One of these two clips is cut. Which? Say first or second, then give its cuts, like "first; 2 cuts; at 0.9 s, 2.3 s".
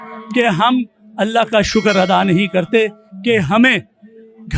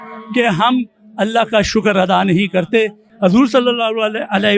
second; 1 cut; at 3.0 s